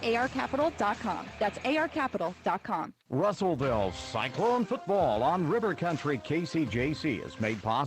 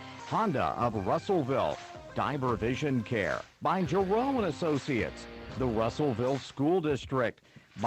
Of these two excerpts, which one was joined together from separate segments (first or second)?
first